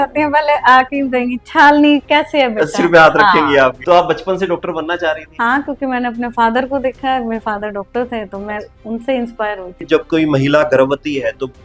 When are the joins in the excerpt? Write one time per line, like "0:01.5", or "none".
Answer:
0:03.8
0:05.3
0:09.8